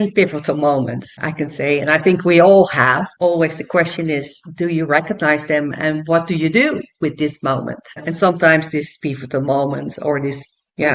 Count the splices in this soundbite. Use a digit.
0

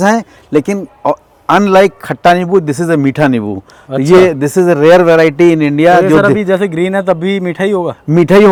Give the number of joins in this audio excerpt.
0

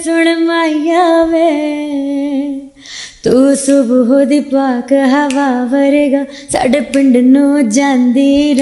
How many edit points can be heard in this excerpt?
0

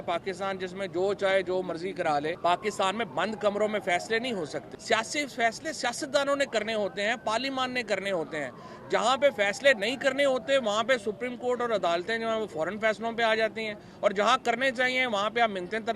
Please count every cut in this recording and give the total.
2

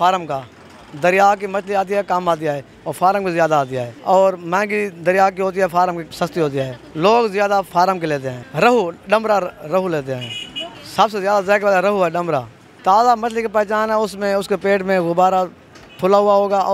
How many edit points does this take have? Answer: 0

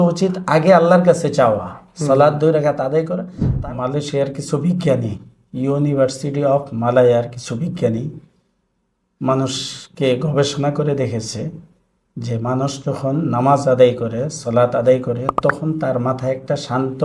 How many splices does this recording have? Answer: 1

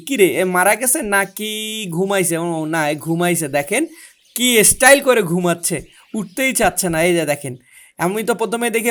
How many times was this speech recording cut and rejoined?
0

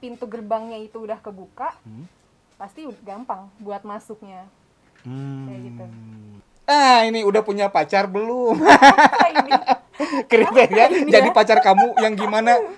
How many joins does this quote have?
1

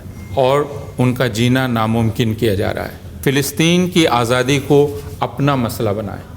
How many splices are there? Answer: 1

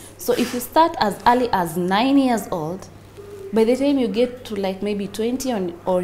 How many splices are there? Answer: 0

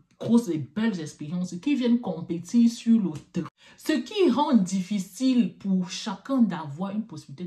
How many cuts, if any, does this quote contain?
1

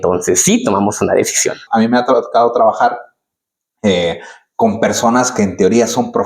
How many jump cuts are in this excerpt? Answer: 1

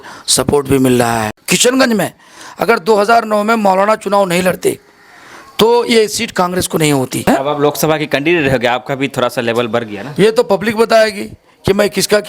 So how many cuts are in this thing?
2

